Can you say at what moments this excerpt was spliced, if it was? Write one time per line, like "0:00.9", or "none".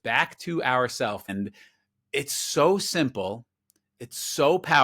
0:01.3